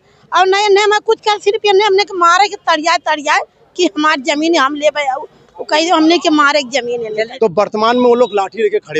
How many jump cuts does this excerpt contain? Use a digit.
1